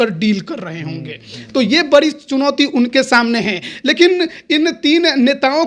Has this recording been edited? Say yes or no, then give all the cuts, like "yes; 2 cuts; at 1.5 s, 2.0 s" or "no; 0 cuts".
no; 0 cuts